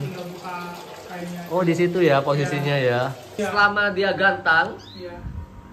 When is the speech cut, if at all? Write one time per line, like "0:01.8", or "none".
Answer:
0:03.3

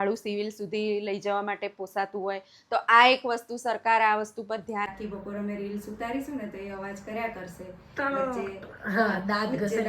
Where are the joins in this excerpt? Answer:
0:04.9

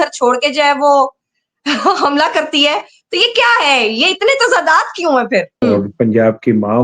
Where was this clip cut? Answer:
0:05.6

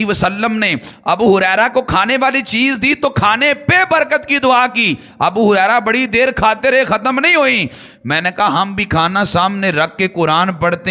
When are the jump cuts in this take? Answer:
none

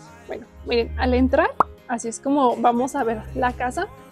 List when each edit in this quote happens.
none

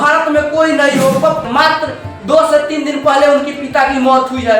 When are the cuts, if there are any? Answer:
0:01.5

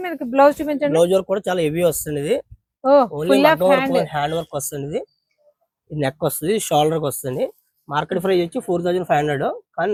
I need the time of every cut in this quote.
none

